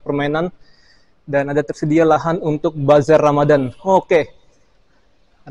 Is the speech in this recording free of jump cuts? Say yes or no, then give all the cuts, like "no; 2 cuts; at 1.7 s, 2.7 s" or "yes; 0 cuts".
yes; 0 cuts